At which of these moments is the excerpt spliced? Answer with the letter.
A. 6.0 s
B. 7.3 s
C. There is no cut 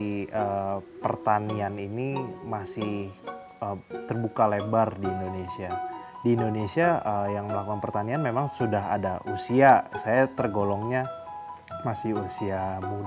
A